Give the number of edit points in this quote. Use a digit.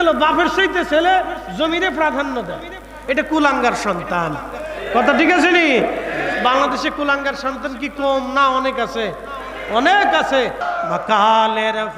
1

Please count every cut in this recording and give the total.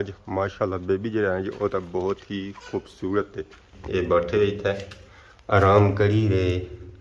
1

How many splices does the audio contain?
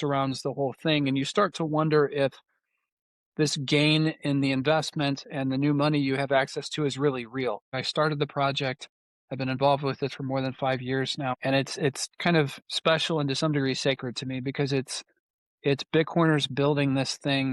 2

